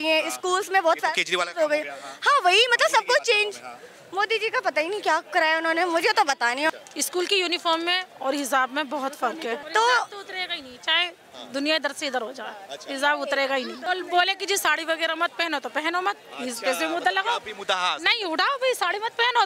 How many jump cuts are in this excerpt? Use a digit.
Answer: 3